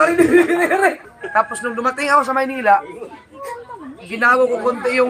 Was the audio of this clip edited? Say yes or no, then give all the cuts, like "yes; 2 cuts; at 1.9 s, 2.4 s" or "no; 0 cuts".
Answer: yes; 1 cut; at 1.1 s